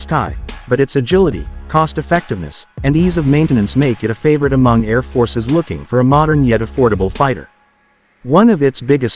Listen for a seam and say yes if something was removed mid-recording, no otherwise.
no